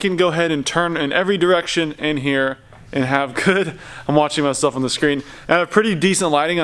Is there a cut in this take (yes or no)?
no